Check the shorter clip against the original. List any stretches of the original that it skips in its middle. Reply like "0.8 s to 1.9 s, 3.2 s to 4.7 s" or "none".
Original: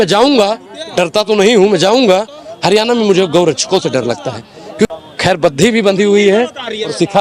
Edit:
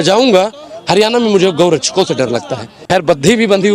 4.5 s to 5.1 s

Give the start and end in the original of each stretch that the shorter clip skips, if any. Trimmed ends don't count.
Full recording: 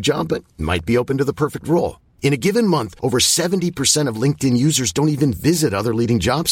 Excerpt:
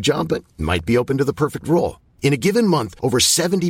none

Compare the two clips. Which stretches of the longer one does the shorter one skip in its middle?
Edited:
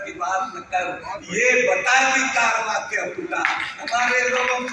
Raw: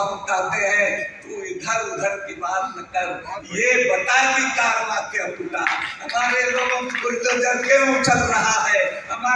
none

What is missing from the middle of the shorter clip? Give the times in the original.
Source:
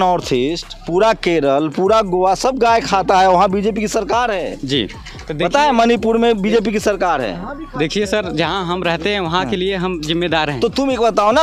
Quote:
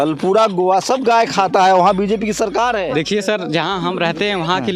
4.4 s to 7.7 s

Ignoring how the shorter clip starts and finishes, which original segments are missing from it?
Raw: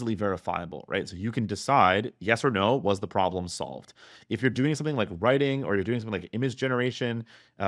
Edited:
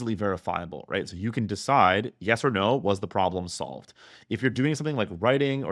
none

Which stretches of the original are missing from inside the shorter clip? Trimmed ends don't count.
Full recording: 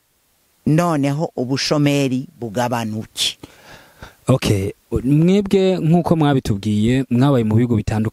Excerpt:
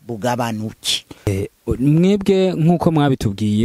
3.6 s to 4.5 s

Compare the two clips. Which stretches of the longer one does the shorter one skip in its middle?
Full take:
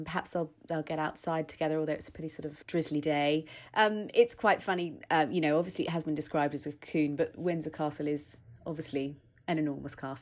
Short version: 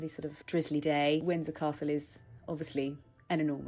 3.4 s to 7.4 s

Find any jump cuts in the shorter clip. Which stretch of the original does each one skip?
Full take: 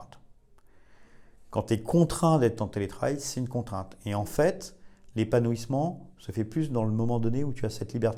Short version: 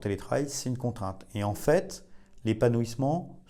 none

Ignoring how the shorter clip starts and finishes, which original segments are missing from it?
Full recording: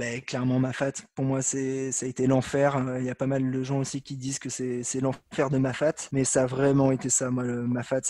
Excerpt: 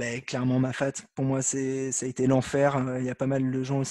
none

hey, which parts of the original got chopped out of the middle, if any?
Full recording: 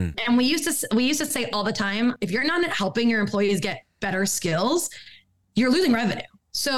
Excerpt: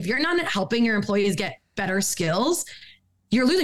none

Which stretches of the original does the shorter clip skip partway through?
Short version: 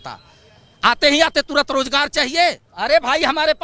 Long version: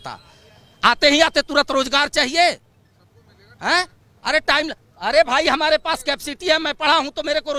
2.7 s to 4.9 s

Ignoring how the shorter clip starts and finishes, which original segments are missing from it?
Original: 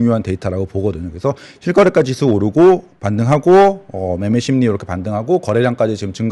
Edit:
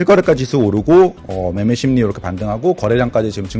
2.9 s to 3.9 s

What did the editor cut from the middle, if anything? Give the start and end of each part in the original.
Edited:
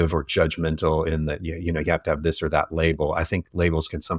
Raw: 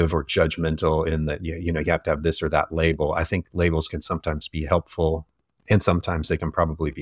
none

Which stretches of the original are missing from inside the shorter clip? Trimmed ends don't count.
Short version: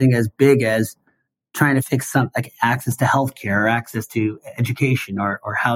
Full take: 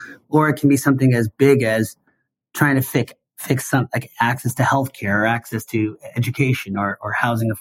2.9 s to 3.4 s

